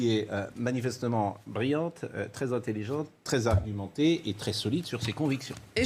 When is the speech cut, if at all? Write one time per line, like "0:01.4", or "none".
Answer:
none

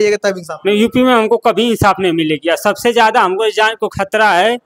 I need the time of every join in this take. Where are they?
none

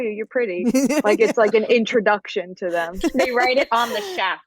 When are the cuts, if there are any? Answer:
0:03.1

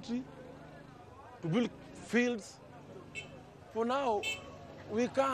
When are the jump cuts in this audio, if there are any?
none

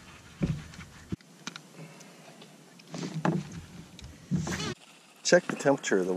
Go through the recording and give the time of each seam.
0:01.1
0:04.7

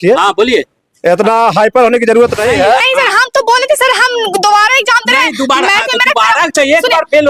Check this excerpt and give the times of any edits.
0:02.9

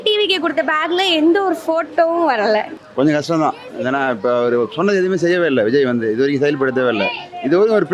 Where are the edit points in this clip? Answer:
0:02.8

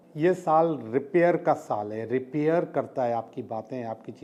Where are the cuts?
none

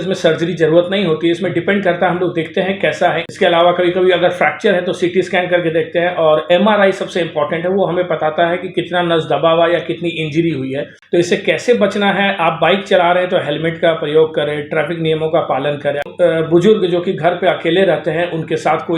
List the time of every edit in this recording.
0:03.3
0:10.9
0:16.0

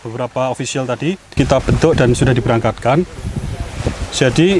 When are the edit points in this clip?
0:01.3

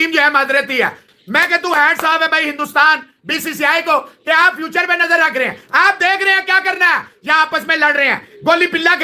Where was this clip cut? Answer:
0:01.1

